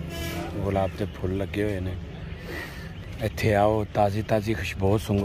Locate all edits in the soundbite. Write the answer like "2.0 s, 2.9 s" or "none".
none